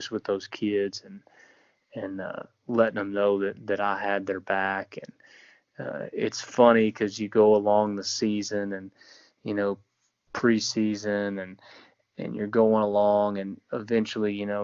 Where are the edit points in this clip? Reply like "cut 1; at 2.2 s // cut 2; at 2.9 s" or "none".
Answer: none